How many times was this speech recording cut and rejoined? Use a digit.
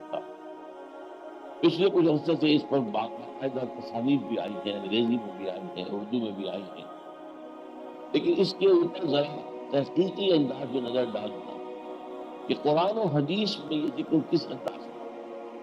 1